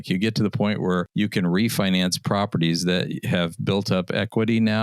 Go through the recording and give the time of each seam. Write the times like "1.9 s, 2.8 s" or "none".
1.1 s